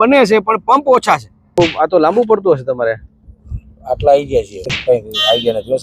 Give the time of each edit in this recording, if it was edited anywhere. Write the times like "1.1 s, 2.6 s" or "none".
1.6 s, 4.8 s